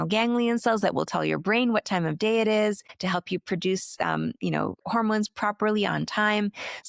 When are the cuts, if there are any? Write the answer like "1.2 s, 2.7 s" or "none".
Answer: 2.9 s, 4.8 s